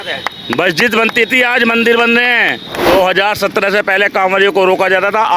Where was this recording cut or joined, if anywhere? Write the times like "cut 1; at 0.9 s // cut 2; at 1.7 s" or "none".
none

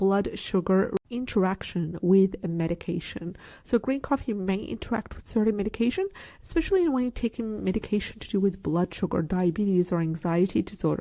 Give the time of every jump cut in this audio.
cut 1; at 1.0 s

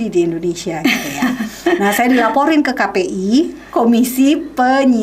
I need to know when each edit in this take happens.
none

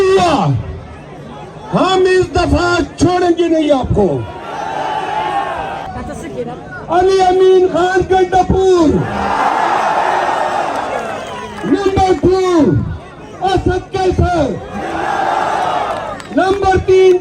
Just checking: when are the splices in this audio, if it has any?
cut 1; at 5.9 s

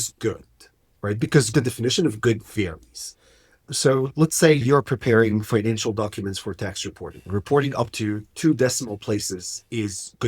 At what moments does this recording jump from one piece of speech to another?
cut 1; at 1.5 s // cut 2; at 4.6 s

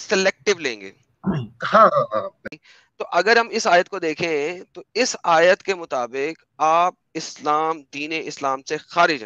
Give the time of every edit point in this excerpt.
cut 1; at 2.5 s

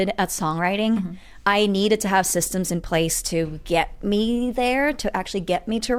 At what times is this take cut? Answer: none

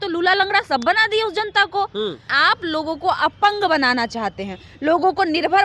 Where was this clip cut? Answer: cut 1; at 2.3 s

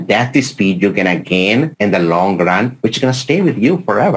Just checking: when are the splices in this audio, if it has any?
cut 1; at 1.7 s

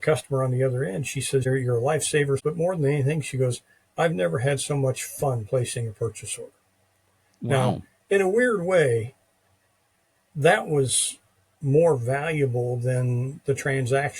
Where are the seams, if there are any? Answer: cut 1; at 1.4 s // cut 2; at 2.4 s

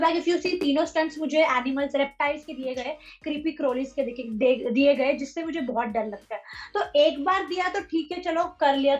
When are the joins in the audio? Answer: none

